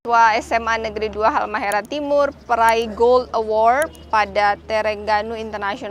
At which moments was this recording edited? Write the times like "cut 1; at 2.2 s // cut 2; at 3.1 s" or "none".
none